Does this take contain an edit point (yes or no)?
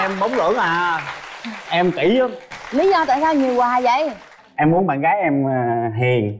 yes